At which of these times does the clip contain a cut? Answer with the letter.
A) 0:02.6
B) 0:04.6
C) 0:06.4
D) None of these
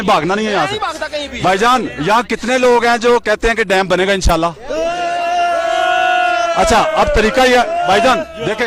D